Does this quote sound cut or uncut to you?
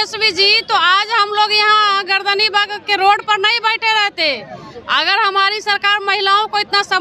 uncut